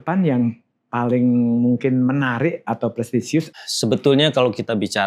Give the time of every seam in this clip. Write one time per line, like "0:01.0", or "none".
0:03.5